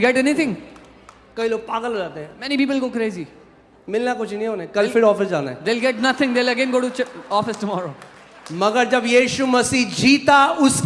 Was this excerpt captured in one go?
yes; 0 cuts

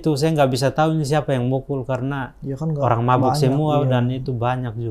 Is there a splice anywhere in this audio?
no; 0 cuts

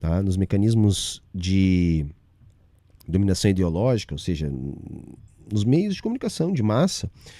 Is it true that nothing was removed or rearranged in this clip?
yes; 0 cuts

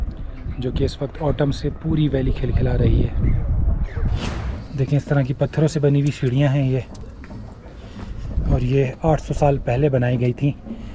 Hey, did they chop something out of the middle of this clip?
yes; 1 cut; at 4.2 s

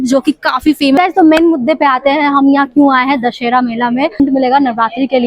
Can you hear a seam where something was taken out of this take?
yes; 2 cuts; at 1.0 s, 4.2 s

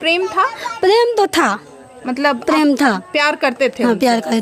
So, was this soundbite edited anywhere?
no; 0 cuts

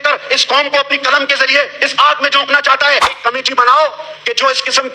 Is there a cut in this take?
yes; 1 cut; at 3.1 s

